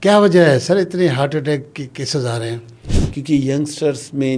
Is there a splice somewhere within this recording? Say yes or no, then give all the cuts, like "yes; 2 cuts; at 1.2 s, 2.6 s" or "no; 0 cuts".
yes; 1 cut; at 2.8 s